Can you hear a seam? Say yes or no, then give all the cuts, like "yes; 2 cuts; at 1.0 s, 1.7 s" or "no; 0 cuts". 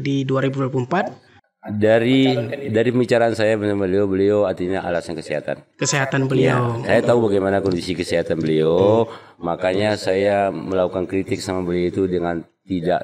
no; 0 cuts